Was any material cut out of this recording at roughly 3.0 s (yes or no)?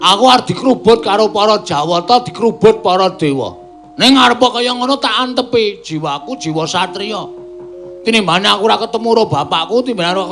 yes